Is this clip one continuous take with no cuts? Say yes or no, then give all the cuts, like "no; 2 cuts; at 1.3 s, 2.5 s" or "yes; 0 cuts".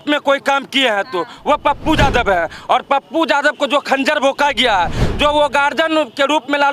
yes; 0 cuts